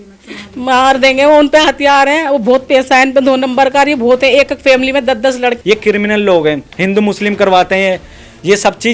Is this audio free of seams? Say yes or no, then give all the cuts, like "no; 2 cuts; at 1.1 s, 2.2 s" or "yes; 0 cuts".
no; 1 cut; at 5.6 s